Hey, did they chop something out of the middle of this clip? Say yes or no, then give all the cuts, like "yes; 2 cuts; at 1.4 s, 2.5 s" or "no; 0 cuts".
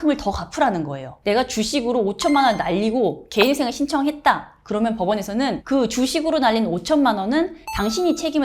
yes; 1 cut; at 1.2 s